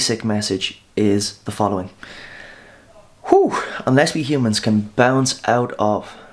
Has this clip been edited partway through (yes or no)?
no